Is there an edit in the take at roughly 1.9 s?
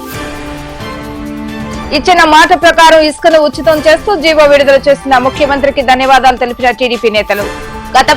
yes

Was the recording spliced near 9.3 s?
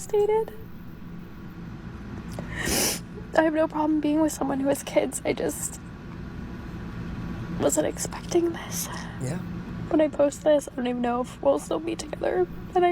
yes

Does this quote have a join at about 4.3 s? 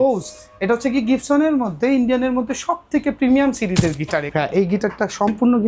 yes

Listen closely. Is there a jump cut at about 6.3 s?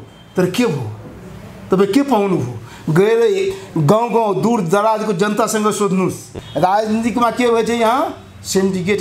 yes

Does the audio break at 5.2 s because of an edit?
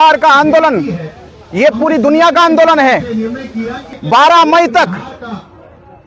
no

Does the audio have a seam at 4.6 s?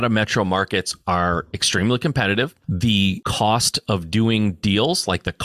no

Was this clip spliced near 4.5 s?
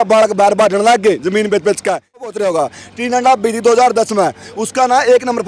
no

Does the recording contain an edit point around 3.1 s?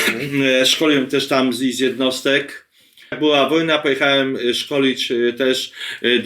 yes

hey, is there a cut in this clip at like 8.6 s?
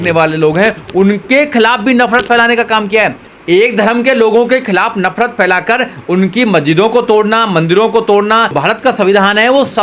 yes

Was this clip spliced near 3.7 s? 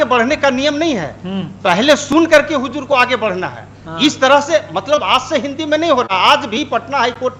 no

